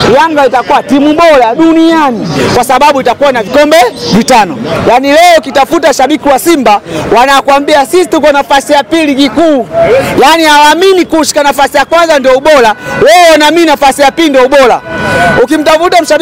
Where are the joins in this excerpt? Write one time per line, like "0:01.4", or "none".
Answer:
0:04.8